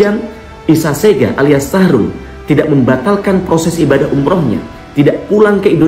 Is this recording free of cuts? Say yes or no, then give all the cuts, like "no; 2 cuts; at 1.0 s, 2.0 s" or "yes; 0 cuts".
yes; 0 cuts